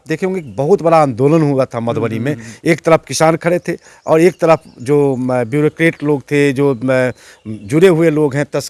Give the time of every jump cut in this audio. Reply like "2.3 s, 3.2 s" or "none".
none